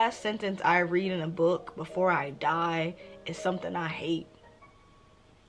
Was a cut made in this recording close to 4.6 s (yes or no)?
yes